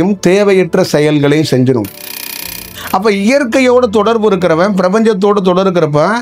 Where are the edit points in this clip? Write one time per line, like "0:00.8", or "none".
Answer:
0:02.3